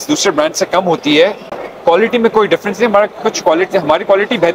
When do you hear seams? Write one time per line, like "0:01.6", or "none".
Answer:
none